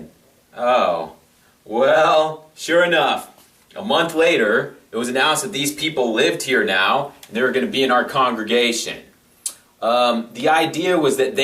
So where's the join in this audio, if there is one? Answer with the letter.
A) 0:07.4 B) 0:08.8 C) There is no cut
B